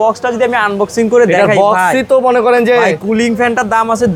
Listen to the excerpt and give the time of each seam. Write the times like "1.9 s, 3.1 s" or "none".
none